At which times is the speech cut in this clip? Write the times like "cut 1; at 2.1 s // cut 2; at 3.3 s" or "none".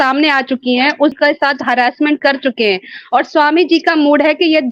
cut 1; at 1.2 s